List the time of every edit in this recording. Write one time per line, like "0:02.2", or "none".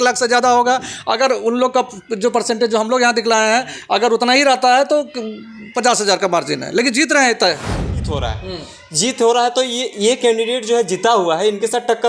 0:08.1